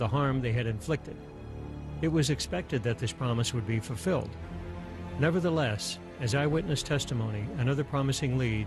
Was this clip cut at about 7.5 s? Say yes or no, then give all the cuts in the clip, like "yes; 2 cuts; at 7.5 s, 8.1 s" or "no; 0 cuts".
yes; 1 cut; at 7.5 s